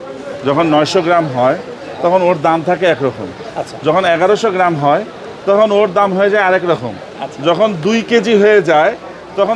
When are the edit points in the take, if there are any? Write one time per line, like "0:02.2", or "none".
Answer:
none